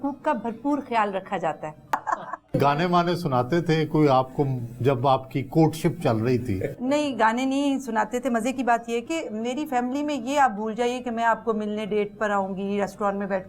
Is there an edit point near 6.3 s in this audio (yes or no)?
no